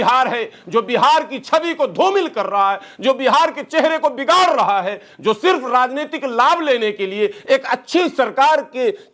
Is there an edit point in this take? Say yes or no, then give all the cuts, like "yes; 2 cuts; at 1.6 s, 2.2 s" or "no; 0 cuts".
no; 0 cuts